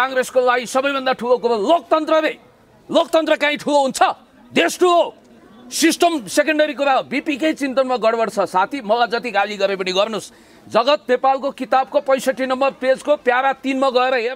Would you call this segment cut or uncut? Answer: uncut